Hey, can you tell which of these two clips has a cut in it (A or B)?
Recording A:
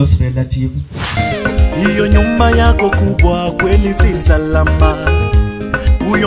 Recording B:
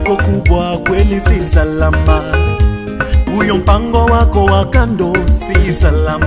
A